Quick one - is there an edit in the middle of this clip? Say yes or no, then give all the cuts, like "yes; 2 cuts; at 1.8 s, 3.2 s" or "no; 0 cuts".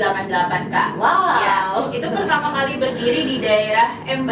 no; 0 cuts